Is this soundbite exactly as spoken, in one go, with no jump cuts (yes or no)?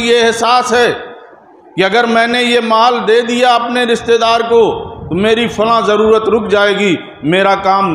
yes